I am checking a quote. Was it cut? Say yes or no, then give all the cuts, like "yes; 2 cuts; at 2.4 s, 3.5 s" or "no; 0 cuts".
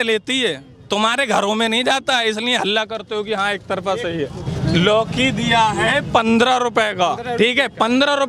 yes; 1 cut; at 4.4 s